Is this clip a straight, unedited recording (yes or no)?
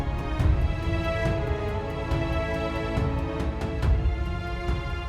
yes